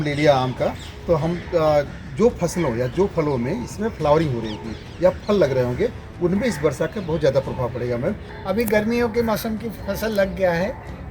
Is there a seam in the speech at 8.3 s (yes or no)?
yes